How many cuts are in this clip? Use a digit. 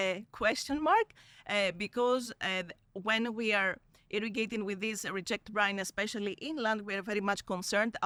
0